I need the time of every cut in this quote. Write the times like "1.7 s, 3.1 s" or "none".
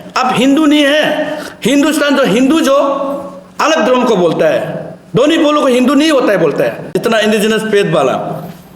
7.0 s